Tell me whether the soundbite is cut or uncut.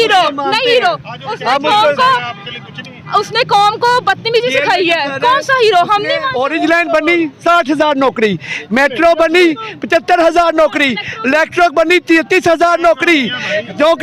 cut